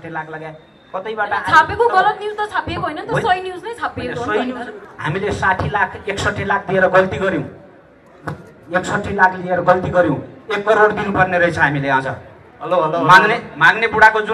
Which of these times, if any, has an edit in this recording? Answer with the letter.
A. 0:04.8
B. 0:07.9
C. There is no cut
A